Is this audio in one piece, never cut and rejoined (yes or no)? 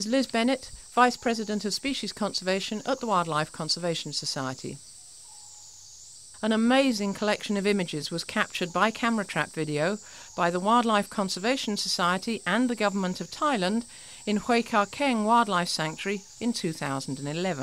yes